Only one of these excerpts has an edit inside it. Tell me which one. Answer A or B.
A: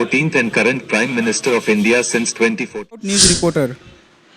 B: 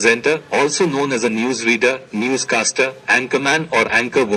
A